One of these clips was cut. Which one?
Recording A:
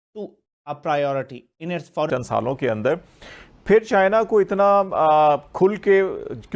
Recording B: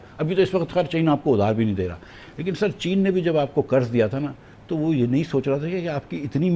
A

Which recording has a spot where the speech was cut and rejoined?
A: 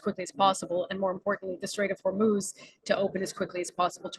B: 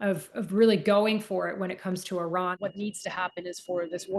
B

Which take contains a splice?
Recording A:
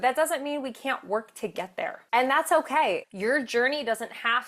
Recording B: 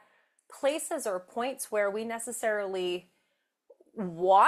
A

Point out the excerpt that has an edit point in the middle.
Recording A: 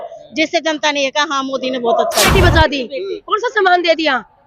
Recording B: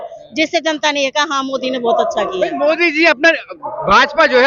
A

